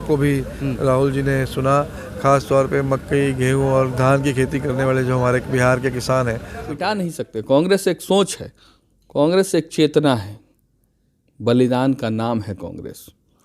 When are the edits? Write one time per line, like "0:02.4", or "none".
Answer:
0:06.6